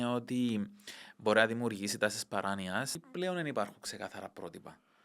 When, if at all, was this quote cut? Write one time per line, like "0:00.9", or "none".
0:02.9